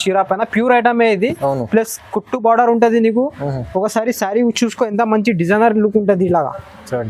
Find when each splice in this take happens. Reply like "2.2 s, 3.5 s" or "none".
none